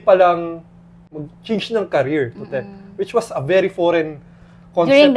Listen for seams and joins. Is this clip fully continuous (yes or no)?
no